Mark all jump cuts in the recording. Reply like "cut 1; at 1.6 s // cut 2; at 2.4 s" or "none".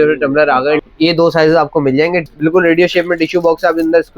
cut 1; at 0.8 s // cut 2; at 2.2 s